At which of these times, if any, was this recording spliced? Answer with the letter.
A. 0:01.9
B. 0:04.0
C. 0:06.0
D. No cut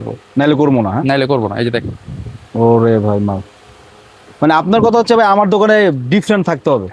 D